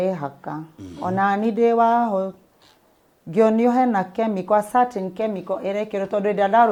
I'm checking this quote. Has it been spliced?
no; 0 cuts

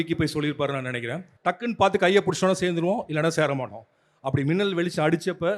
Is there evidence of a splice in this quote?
yes; 1 cut; at 1.2 s

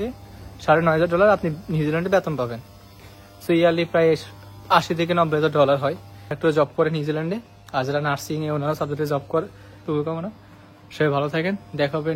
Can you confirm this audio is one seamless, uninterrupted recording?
yes; 0 cuts

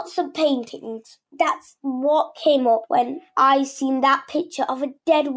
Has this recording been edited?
yes; 2 cuts; at 1.2 s, 2.8 s

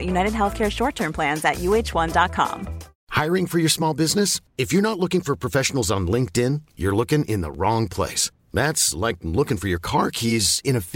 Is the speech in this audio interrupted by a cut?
yes; 1 cut; at 3.0 s

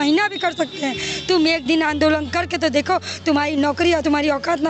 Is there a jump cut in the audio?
no; 0 cuts

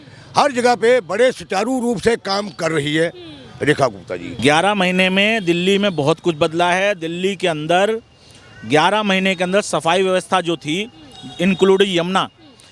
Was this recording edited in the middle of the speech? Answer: yes; 1 cut; at 4.3 s

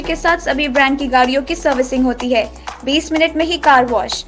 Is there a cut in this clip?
no; 0 cuts

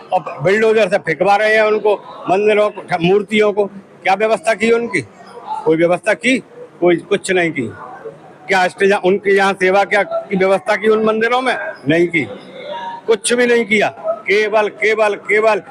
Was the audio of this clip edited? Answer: no; 0 cuts

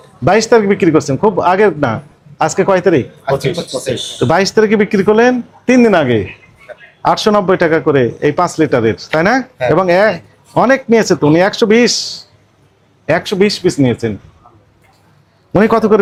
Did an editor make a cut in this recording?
no; 0 cuts

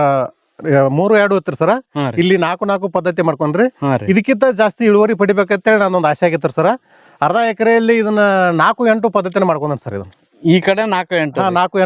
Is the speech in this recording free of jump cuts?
yes; 0 cuts

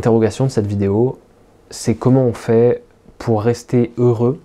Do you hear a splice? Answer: no; 0 cuts

